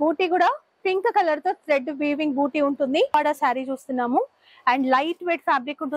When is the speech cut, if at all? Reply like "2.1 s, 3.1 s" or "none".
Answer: 3.1 s